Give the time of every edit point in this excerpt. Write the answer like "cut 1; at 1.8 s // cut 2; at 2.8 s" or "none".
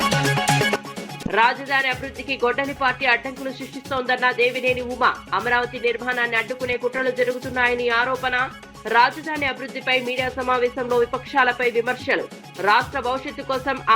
cut 1; at 1.0 s